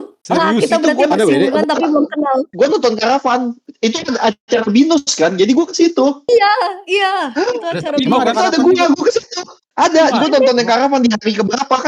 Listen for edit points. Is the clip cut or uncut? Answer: cut